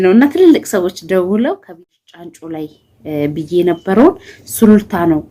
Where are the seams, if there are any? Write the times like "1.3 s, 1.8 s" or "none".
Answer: 1.8 s